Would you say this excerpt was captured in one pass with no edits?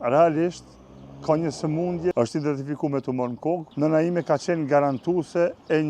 no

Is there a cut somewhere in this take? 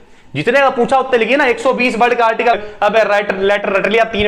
yes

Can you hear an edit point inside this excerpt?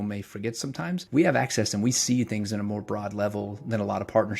yes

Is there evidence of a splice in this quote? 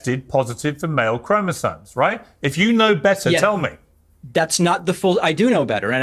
no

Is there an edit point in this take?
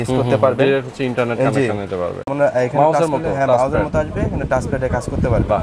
yes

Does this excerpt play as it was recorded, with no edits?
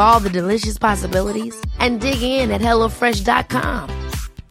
yes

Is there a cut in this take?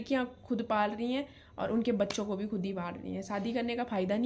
no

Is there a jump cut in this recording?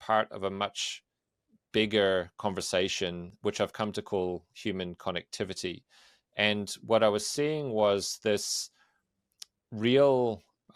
no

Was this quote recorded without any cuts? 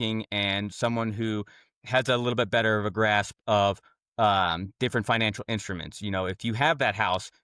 yes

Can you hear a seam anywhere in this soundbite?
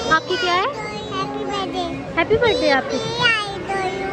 no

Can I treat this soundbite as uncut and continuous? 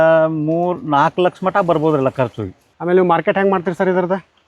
no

